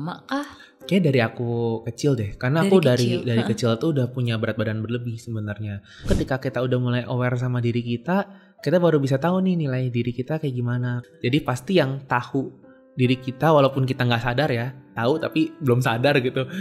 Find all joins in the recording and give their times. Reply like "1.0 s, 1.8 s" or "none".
6.1 s, 11.0 s